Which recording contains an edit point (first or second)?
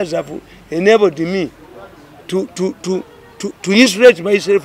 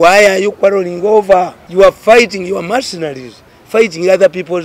second